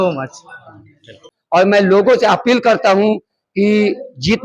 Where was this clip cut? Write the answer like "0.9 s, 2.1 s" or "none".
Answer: 1.3 s

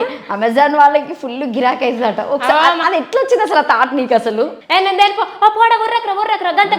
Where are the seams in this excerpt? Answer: 4.6 s

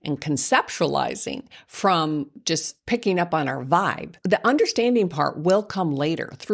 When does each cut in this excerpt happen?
2.7 s, 4.2 s

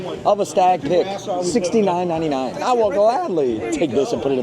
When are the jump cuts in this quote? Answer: 2.6 s

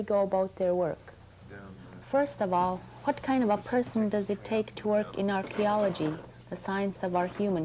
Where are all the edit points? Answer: 2.2 s

